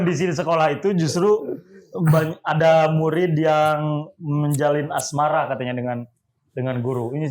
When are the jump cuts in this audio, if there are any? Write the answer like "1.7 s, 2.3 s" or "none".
none